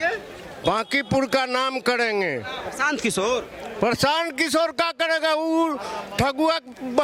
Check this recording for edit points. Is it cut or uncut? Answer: uncut